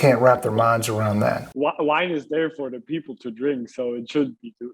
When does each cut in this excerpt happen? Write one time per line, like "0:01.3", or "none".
0:01.5